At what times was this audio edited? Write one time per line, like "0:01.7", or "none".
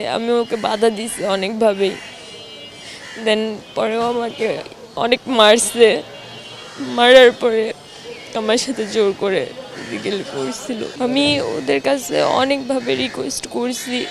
0:10.9

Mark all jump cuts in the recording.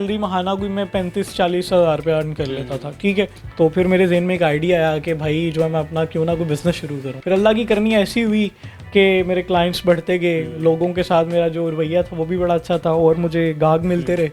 0:03.4
0:07.1

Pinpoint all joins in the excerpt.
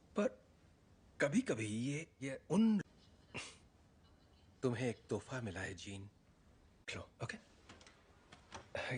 none

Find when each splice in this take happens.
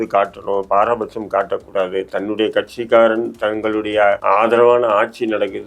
0:04.2

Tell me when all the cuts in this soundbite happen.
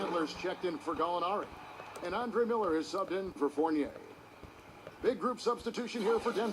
0:04.4

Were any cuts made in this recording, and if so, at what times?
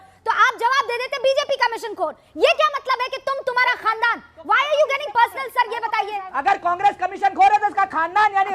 none

